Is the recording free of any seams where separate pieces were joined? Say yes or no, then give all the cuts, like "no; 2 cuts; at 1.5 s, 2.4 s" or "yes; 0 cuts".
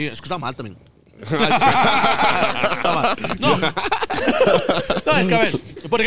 yes; 0 cuts